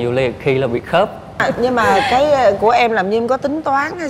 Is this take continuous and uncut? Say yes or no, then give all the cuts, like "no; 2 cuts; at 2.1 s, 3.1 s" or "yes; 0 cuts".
no; 1 cut; at 1.4 s